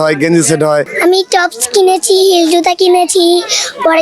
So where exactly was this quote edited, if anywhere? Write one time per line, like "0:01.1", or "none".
0:00.9